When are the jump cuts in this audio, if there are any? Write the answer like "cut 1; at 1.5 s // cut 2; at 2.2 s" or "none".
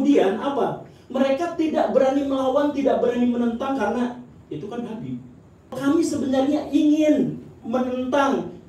cut 1; at 5.8 s